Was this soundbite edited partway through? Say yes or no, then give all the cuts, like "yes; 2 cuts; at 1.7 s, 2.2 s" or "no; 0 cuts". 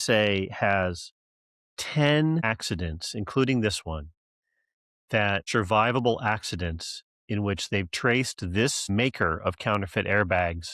yes; 2 cuts; at 2.4 s, 5.5 s